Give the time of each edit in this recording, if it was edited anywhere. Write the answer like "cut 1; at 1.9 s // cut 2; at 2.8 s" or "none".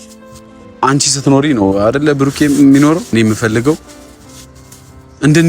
cut 1; at 3.1 s